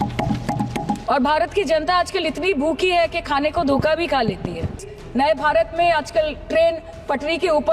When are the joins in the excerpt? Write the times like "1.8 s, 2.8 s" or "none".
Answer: 1.0 s, 5.0 s